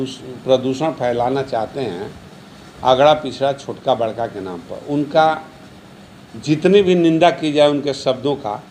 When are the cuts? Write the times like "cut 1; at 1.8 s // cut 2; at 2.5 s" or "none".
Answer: none